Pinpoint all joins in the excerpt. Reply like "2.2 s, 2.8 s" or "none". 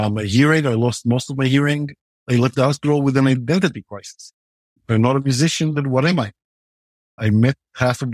2.2 s, 7.2 s